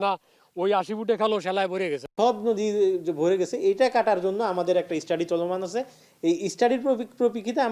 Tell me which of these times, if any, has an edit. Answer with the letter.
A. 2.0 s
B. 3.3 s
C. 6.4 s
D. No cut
A